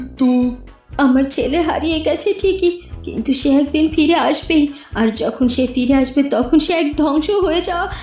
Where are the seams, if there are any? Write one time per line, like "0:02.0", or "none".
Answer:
none